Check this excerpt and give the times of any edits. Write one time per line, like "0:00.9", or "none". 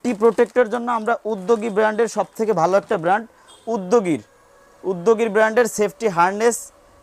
none